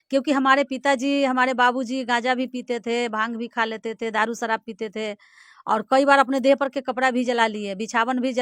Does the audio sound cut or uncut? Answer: uncut